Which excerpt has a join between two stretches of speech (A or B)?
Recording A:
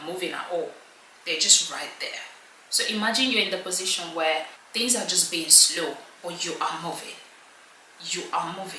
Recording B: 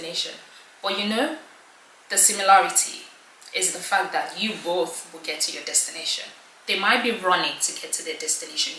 A